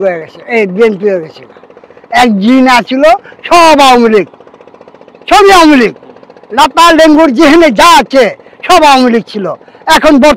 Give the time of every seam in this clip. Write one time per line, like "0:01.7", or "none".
none

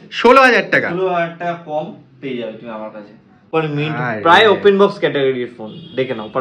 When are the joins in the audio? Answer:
0:03.4

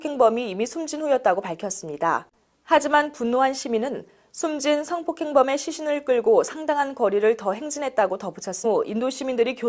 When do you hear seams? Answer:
none

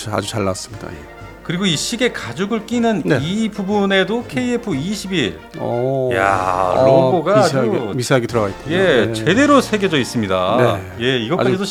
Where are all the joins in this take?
none

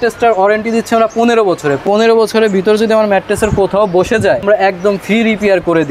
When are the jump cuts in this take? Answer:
0:01.8
0:04.4

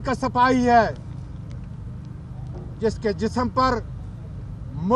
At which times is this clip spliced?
none

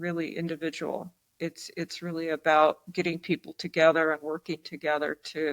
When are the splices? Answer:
none

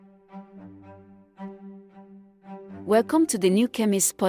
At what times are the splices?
0:02.6

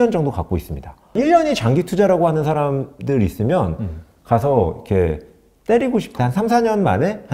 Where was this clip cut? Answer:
0:01.1
0:06.2

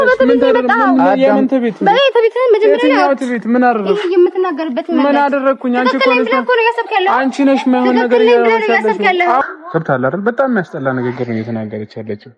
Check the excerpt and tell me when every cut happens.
0:09.4

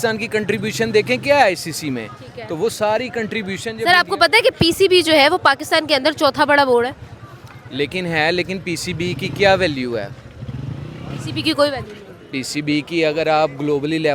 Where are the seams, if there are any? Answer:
none

